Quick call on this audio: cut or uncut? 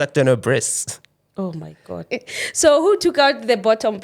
cut